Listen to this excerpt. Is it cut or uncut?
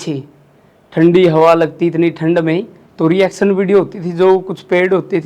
cut